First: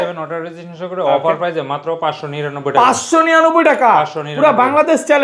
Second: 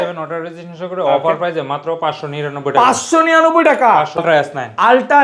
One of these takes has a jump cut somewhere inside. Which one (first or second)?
second